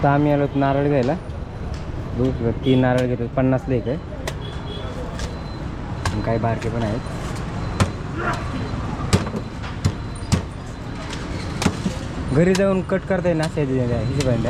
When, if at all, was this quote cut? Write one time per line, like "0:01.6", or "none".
none